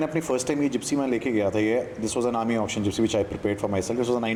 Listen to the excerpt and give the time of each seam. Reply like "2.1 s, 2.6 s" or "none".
none